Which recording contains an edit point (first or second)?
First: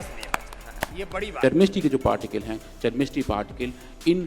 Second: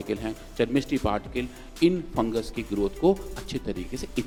first